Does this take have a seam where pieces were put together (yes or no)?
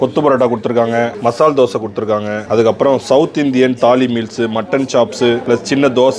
yes